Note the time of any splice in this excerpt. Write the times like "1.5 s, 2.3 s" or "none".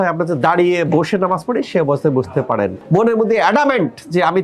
2.8 s